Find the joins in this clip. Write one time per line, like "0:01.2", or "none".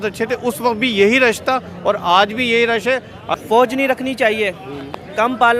0:03.3